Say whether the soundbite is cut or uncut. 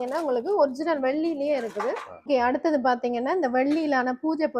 cut